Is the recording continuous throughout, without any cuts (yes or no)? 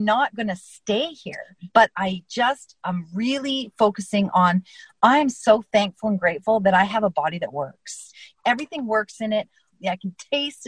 no